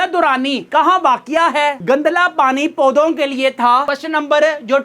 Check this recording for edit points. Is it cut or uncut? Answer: cut